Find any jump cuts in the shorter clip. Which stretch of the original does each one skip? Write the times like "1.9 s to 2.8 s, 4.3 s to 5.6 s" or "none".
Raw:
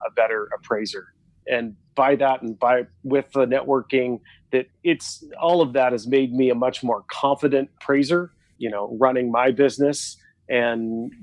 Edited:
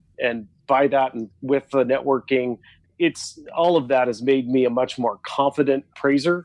2.5 s to 2.9 s, 4.4 s to 4.7 s

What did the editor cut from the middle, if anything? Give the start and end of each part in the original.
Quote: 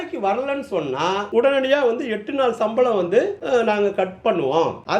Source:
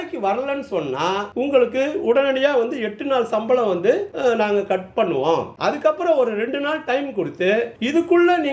1.3 s to 2.0 s

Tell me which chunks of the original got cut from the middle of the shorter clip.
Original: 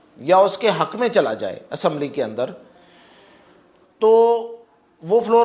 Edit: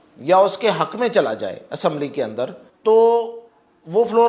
2.7 s to 3.8 s

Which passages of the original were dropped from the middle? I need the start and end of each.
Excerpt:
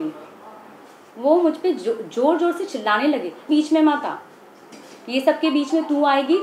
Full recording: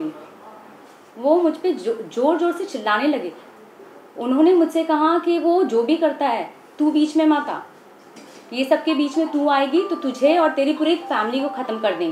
3.5 s to 6.9 s

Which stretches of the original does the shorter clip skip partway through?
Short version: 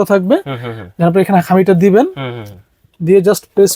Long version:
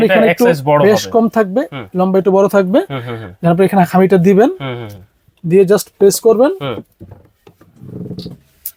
none

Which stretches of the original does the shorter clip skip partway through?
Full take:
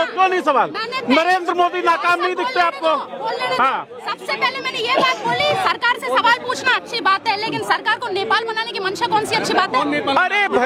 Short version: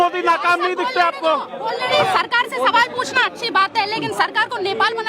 3.5 s to 5.4 s

